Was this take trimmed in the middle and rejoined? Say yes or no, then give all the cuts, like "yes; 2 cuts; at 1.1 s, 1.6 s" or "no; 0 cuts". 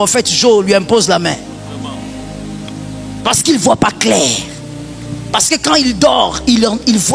no; 0 cuts